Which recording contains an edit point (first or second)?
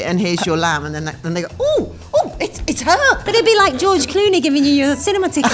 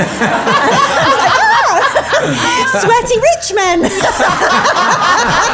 first